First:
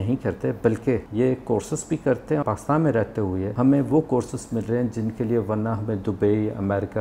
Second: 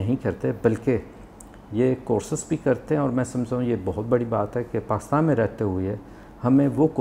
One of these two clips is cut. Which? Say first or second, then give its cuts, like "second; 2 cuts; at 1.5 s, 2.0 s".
first; 3 cuts; at 1.1 s, 2.4 s, 3.5 s